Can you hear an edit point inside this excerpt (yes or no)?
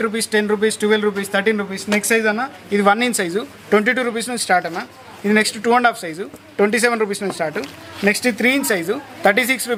no